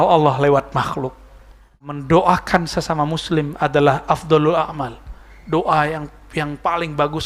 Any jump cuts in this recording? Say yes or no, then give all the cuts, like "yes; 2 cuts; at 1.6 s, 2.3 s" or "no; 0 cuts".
yes; 1 cut; at 1.9 s